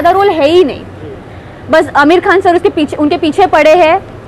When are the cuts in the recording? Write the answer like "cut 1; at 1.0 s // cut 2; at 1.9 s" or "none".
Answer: none

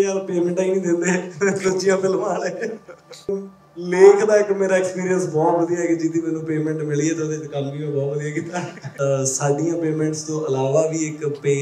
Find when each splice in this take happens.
cut 1; at 3.3 s // cut 2; at 8.8 s

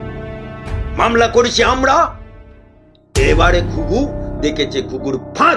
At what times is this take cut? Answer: none

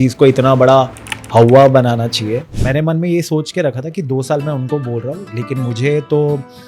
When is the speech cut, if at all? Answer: cut 1; at 2.5 s

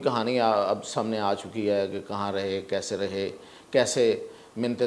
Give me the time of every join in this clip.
none

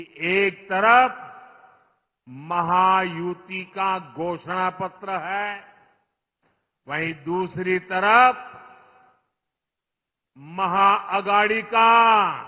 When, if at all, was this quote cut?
none

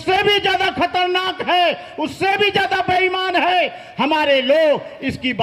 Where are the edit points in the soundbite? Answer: none

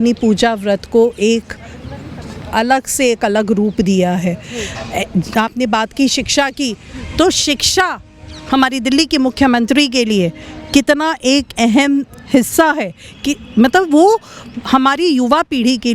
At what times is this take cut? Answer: none

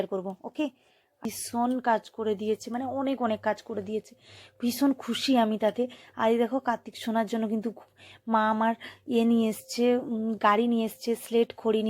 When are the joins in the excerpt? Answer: cut 1; at 1.2 s

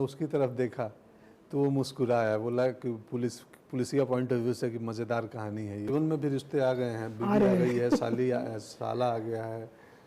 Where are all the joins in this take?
cut 1; at 5.9 s

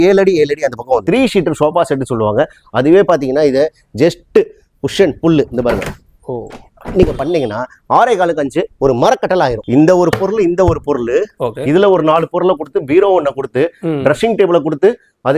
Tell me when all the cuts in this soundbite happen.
cut 1; at 1.0 s // cut 2; at 9.6 s

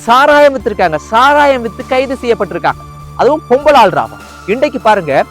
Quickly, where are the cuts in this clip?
cut 1; at 4.4 s

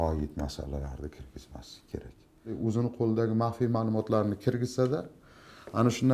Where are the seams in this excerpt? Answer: cut 1; at 2.6 s

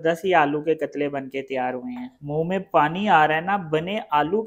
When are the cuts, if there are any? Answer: cut 1; at 2.1 s

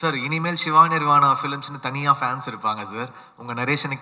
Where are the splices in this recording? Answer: none

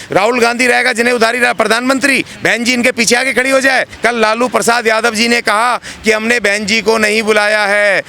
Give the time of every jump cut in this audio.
cut 1; at 3.9 s

